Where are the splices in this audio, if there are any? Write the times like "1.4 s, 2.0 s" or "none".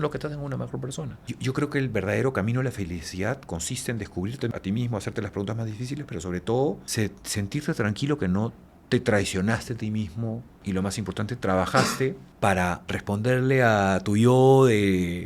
1.2 s, 4.5 s, 6.8 s, 10.5 s, 12.3 s, 12.8 s